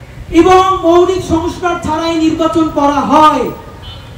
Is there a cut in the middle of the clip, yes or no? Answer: no